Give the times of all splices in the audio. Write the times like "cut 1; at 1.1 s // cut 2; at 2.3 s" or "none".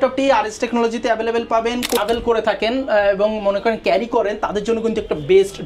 cut 1; at 2.0 s